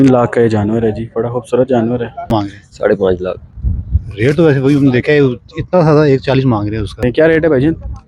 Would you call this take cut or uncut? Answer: cut